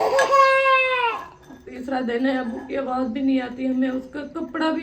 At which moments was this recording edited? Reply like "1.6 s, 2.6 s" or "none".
1.2 s

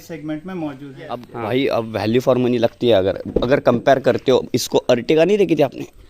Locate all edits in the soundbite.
1.3 s

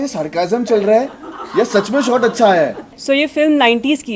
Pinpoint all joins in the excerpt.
2.9 s

